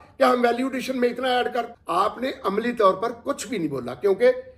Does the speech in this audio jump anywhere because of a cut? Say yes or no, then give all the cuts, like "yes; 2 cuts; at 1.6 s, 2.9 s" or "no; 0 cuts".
yes; 1 cut; at 1.8 s